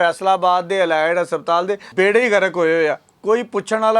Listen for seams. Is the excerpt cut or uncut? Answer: cut